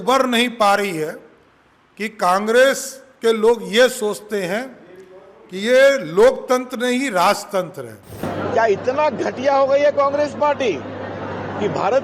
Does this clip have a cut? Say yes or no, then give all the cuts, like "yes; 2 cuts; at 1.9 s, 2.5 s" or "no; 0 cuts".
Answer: yes; 1 cut; at 8.2 s